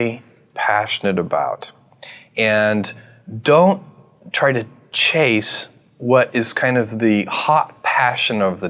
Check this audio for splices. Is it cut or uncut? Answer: uncut